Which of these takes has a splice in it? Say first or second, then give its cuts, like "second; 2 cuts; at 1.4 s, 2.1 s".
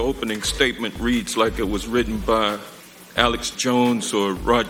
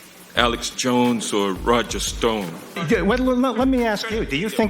second; 1 cut; at 2.8 s